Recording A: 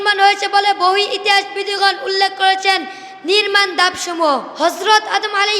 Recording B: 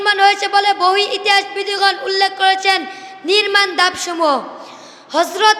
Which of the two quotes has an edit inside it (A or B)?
A